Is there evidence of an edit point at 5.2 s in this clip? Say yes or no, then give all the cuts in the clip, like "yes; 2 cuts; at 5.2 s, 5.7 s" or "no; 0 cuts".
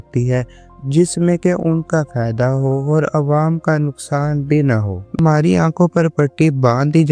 yes; 1 cut; at 5.2 s